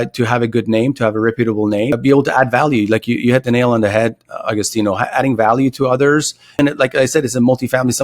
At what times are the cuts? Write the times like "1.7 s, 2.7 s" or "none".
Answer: 1.9 s, 6.6 s